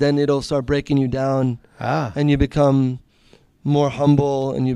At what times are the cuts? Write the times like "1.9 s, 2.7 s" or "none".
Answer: none